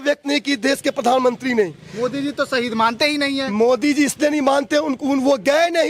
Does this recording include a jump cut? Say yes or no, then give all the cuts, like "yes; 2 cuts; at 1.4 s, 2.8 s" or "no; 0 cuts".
no; 0 cuts